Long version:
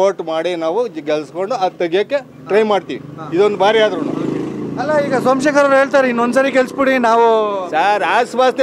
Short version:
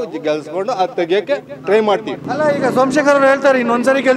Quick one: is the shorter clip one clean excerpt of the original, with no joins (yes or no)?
no